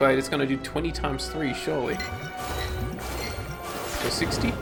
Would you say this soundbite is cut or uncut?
uncut